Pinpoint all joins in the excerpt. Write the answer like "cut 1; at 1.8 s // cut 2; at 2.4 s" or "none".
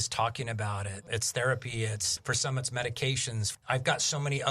cut 1; at 1.1 s // cut 2; at 3.6 s

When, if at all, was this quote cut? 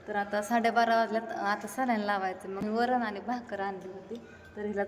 cut 1; at 2.6 s

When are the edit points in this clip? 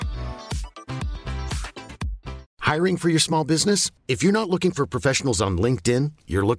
cut 1; at 2.5 s

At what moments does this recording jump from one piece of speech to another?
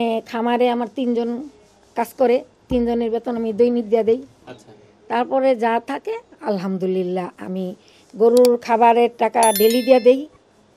none

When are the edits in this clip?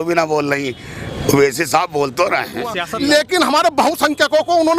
cut 1; at 2.8 s

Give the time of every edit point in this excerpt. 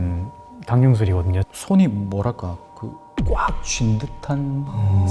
cut 1; at 1.4 s

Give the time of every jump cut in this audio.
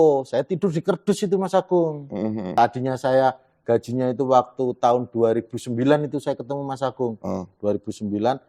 cut 1; at 2.5 s

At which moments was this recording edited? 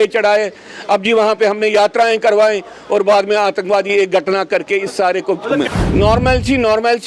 cut 1; at 5.7 s

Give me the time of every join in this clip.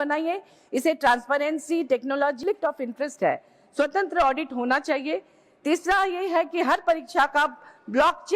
cut 1; at 2.4 s

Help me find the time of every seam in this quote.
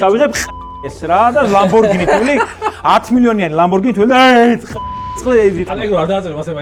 cut 1; at 5.7 s

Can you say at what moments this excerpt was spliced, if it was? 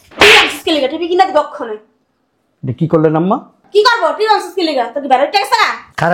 none

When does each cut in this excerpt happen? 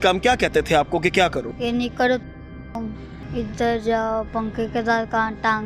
cut 1; at 1.5 s // cut 2; at 3.1 s

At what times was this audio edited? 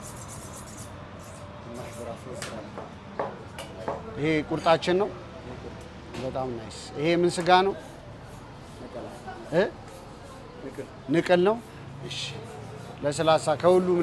none

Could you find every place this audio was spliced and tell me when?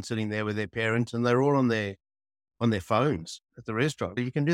none

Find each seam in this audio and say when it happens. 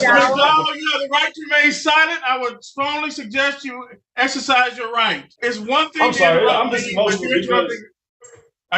cut 1; at 5.3 s

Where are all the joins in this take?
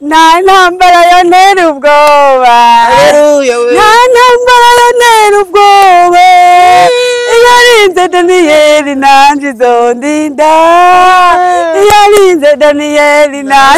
none

